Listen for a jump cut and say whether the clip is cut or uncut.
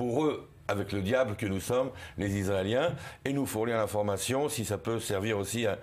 uncut